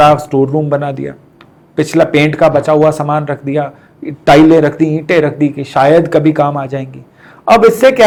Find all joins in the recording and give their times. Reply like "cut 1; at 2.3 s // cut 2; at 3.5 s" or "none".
none